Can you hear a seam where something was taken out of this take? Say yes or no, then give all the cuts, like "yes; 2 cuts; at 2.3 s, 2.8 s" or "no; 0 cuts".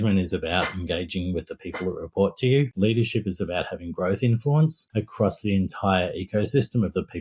yes; 1 cut; at 2.7 s